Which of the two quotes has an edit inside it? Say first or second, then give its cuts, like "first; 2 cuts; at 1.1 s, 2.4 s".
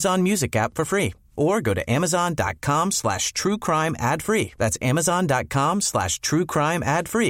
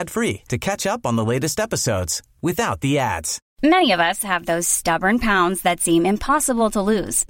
second; 1 cut; at 3.4 s